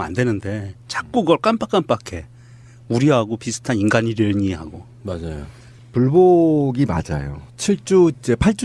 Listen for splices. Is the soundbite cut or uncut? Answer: cut